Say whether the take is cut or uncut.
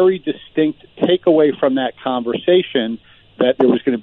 uncut